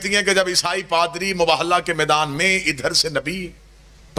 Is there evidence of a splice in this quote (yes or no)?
no